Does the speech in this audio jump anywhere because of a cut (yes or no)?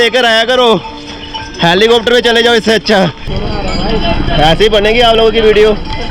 yes